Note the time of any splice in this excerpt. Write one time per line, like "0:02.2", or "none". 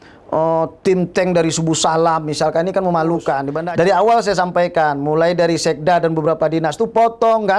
0:03.6

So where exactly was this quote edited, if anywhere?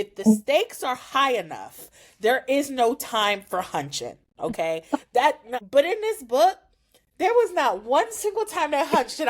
0:05.5

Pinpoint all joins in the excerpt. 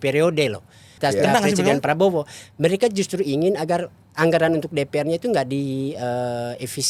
0:00.9

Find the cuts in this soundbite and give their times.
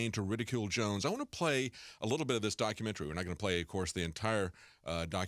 0:01.6

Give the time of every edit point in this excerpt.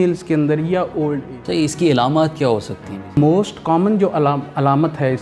0:01.2
0:03.2

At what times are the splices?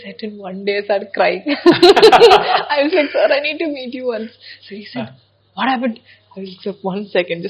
none

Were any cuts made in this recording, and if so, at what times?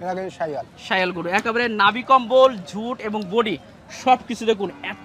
none

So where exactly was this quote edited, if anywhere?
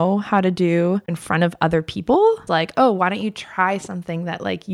0:01.2
0:02.5

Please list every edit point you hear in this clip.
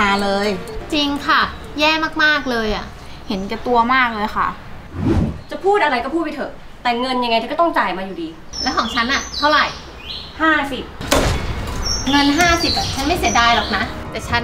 0:11.0

